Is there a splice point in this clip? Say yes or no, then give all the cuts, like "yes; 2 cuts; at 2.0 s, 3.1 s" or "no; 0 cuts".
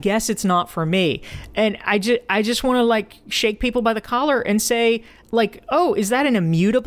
no; 0 cuts